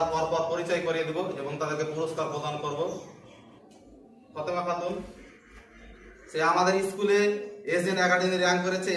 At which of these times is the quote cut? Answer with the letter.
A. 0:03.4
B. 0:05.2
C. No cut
A